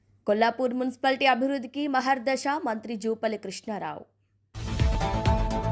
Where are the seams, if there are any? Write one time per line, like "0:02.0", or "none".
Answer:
none